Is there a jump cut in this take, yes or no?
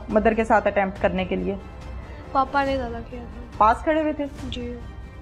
no